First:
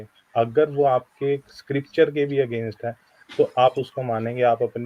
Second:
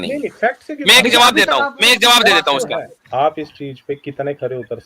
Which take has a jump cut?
second; 1 cut; at 2.9 s

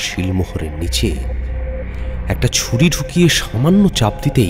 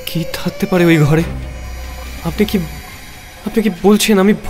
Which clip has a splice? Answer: second; 1 cut; at 1.9 s

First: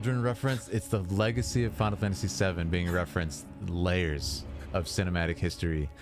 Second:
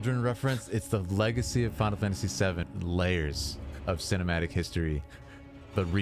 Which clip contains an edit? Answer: second; 1 cut; at 2.6 s

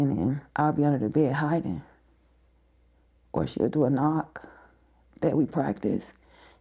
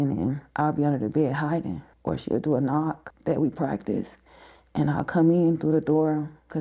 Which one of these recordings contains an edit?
second; 2 cuts; at 1.9 s, 3.1 s

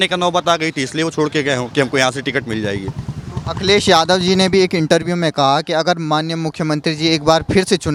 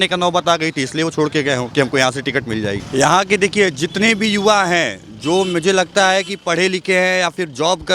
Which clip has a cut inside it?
second; 1 cut; at 2.8 s

